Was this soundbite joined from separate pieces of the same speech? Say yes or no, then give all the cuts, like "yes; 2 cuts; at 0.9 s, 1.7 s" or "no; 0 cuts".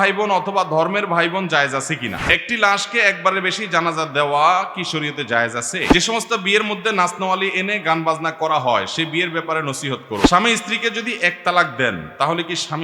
yes; 3 cuts; at 2.2 s, 5.9 s, 10.3 s